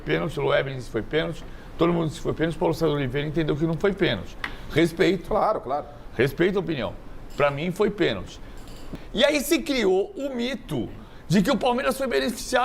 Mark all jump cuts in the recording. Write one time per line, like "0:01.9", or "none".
0:08.8